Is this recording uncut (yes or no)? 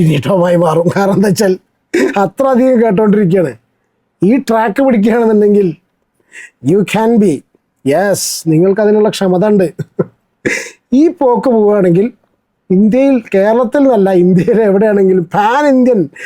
yes